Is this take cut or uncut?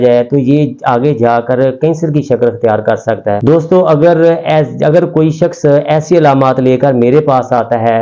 uncut